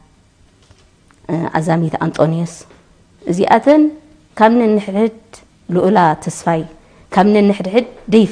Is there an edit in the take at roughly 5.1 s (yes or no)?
no